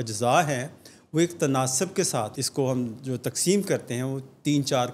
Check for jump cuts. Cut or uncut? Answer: cut